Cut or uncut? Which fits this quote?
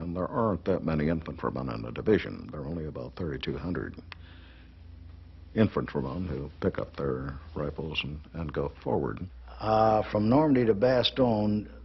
cut